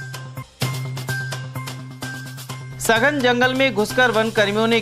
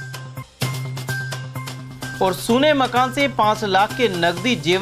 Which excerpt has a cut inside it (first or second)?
first